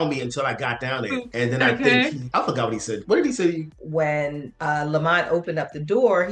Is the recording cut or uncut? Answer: cut